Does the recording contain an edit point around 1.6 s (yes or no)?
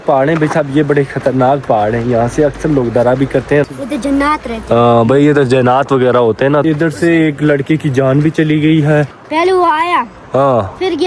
no